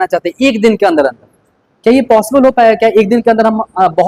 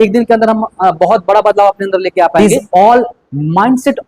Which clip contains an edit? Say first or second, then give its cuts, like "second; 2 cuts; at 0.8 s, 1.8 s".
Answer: second; 1 cut; at 2.4 s